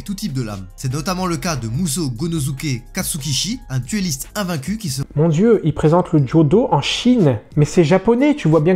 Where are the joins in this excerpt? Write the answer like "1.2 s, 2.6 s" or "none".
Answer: 7.5 s